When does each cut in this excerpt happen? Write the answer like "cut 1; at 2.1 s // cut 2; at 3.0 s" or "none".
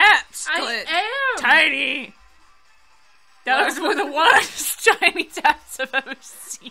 none